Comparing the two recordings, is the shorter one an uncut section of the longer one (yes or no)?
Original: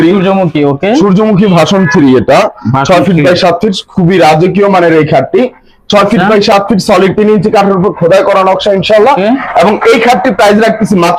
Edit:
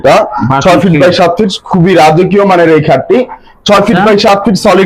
yes